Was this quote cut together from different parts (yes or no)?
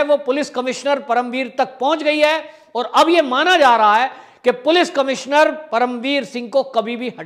no